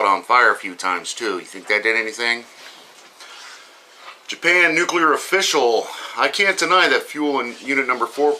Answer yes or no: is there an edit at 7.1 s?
yes